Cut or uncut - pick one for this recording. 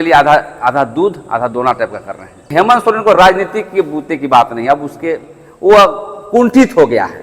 cut